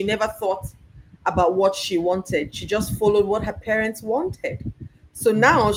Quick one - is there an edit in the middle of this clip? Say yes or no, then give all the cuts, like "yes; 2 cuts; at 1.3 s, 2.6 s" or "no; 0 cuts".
no; 0 cuts